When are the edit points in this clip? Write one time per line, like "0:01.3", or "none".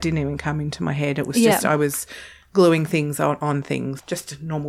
0:03.6